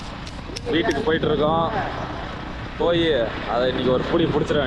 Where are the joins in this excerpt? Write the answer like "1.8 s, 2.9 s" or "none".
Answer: none